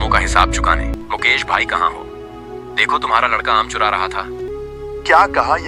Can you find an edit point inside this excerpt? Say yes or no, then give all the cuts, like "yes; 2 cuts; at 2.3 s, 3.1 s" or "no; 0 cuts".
yes; 2 cuts; at 0.9 s, 4.5 s